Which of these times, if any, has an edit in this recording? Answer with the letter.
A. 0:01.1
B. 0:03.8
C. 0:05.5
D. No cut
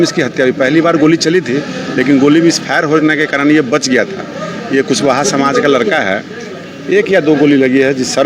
D